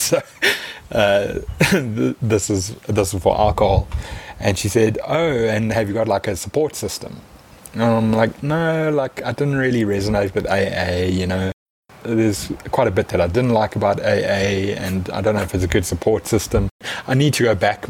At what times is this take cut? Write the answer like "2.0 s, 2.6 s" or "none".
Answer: 11.9 s, 16.9 s